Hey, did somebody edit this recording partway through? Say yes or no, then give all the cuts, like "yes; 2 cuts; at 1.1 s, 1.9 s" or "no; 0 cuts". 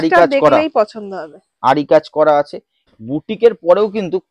yes; 1 cut; at 2.9 s